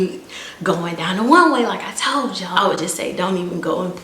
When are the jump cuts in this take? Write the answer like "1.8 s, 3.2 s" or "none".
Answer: 2.6 s